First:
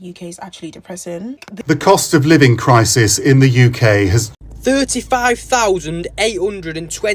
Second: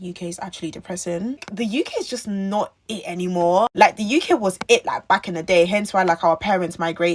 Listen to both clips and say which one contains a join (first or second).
first